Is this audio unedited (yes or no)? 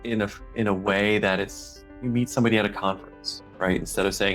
yes